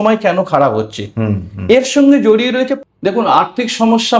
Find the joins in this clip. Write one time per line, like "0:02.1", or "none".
0:02.7